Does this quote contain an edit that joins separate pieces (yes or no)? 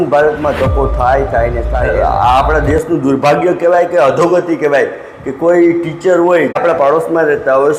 yes